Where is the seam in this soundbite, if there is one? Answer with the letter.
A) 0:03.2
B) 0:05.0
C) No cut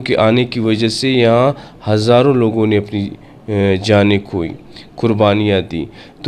C